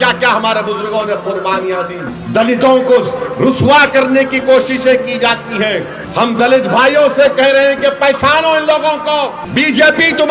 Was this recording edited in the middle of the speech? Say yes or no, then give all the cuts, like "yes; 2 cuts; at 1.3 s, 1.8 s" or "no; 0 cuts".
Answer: yes; 3 cuts; at 2.1 s, 6.0 s, 9.4 s